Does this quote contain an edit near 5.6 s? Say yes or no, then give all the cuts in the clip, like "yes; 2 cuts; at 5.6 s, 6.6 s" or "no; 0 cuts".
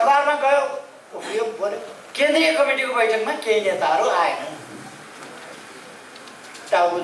no; 1 cut; at 2.0 s